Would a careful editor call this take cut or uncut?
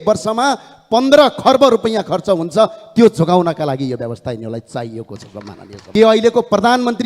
cut